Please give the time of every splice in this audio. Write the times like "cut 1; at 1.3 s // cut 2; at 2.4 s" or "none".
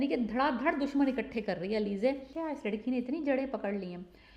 cut 1; at 2.3 s